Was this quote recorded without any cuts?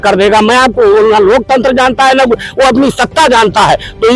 yes; 0 cuts

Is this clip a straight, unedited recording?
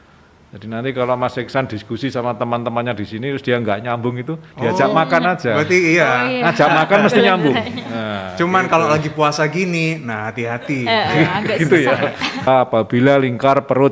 no; 1 cut; at 12.5 s

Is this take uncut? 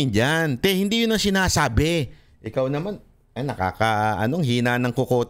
yes; 0 cuts

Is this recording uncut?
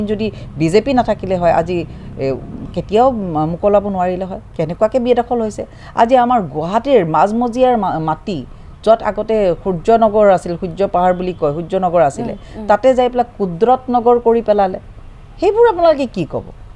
yes; 0 cuts

